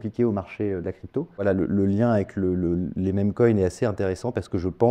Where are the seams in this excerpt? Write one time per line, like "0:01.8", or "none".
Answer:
0:01.4

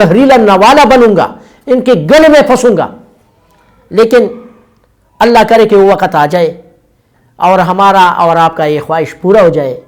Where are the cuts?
none

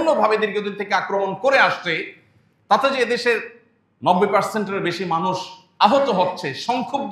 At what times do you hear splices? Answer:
none

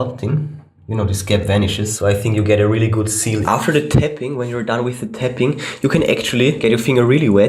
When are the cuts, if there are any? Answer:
0:01.9
0:03.4
0:06.6

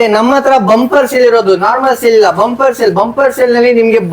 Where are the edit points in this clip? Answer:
none

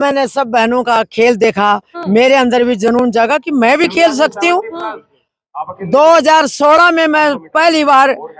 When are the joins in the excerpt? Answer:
none

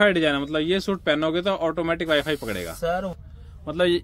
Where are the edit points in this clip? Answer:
0:03.1

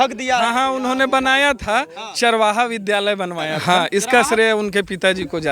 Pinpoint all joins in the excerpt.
0:03.5

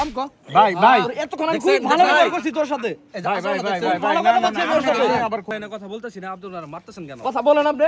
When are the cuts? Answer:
0:05.5

